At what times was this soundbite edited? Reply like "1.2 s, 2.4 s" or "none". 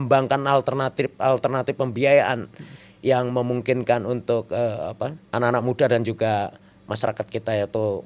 5.2 s